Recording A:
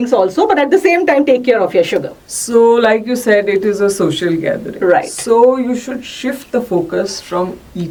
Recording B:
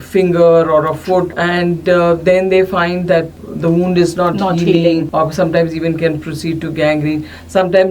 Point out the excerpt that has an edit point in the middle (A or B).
B